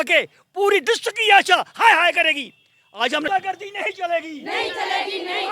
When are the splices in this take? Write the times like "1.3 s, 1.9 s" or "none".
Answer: 3.3 s